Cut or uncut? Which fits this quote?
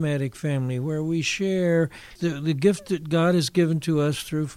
cut